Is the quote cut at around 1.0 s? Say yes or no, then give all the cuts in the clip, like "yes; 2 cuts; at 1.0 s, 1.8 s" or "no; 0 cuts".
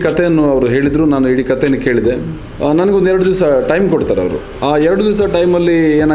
no; 2 cuts; at 2.3 s, 4.4 s